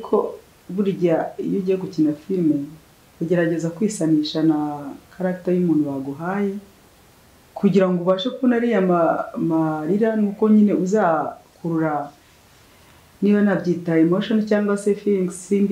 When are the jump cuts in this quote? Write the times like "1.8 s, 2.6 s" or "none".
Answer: none